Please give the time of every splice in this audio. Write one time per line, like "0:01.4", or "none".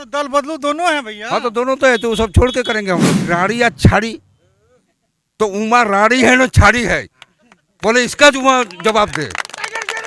0:03.2